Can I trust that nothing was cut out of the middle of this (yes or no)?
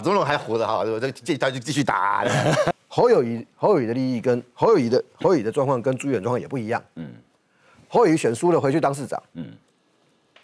no